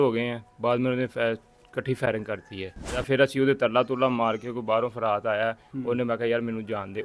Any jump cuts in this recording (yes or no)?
yes